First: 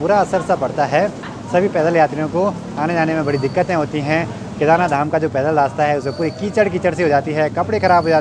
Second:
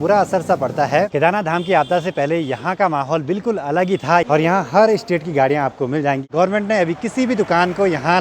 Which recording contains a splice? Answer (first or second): second